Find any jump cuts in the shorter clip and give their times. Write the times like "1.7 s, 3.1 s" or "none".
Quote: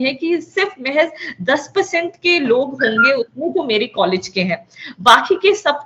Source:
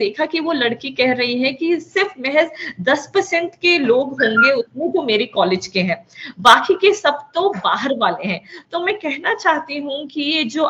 none